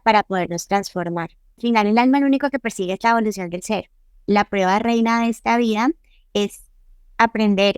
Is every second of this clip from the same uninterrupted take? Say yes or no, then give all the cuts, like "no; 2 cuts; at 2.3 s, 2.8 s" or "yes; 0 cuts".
no; 2 cuts; at 1.6 s, 4.2 s